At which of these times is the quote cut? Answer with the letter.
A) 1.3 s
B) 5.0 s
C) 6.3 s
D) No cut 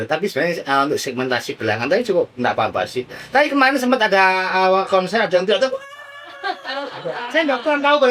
D